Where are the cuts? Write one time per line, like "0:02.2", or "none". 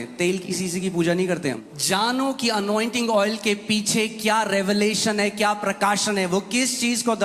0:01.7